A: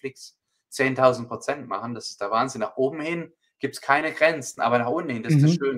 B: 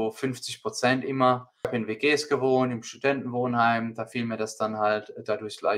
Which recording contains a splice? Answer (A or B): B